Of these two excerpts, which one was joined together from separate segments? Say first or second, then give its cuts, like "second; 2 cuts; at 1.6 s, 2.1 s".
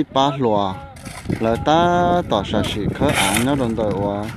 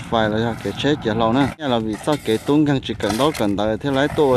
second; 1 cut; at 1.7 s